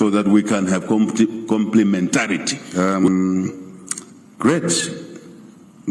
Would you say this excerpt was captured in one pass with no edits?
no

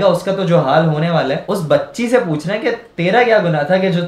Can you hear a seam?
yes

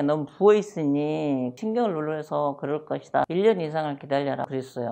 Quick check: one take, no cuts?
yes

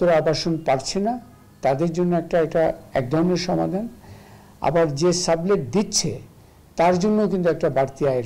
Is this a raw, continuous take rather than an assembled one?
yes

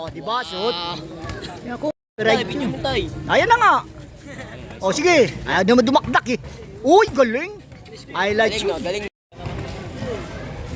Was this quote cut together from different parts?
yes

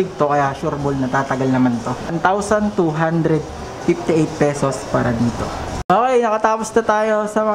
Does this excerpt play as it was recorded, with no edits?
yes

